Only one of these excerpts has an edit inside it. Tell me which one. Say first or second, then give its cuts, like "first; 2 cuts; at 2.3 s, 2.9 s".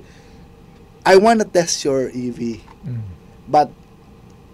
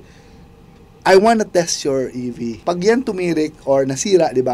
second; 1 cut; at 2.6 s